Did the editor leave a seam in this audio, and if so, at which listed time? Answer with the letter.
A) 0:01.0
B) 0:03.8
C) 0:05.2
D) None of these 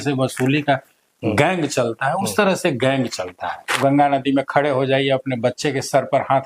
B